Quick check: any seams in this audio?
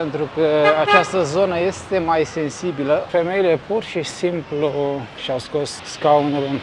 yes; 2 cuts; at 3.1 s, 5.3 s

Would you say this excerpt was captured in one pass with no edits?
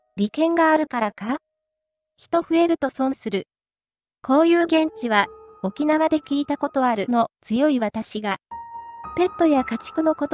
yes; 0 cuts

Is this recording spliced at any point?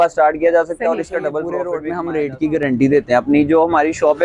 yes; 1 cut; at 1.6 s

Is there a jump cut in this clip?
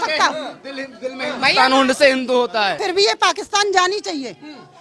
yes; 1 cut; at 2.8 s

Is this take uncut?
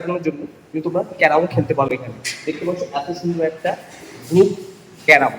yes; 0 cuts

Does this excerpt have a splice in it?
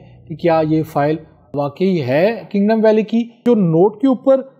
yes; 2 cuts; at 1.5 s, 3.4 s

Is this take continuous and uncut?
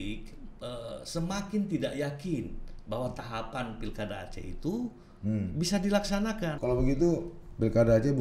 no; 1 cut; at 6.5 s

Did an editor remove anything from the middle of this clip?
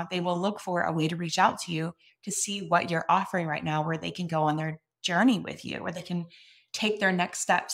no; 0 cuts

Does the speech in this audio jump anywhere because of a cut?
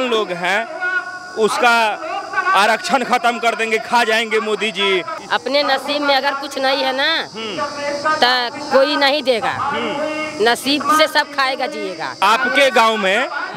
yes; 2 cuts; at 5.2 s, 12.2 s

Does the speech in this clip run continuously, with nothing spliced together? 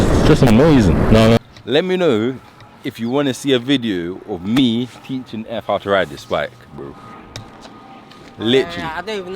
no; 1 cut; at 1.4 s

